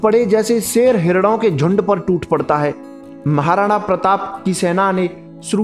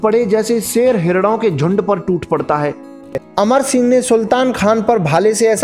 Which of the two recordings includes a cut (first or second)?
second